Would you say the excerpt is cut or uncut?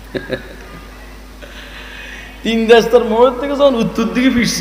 uncut